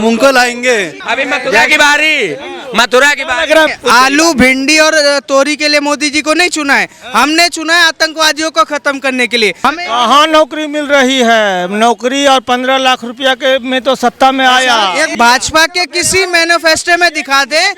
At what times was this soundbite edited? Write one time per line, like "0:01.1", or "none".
0:01.0
0:03.7
0:09.7
0:15.1

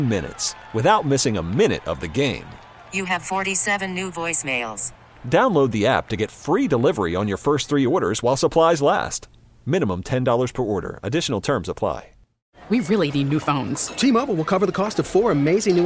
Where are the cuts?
0:12.4

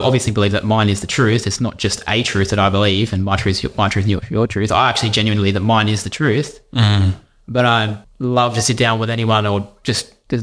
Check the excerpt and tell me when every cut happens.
0:08.0

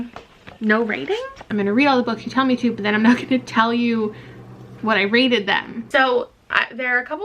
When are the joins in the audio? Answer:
0:01.4
0:05.8

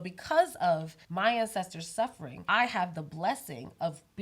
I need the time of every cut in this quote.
0:01.0
0:02.3

